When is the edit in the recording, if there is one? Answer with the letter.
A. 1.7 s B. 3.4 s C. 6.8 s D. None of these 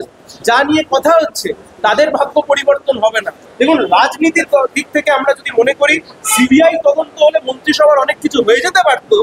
B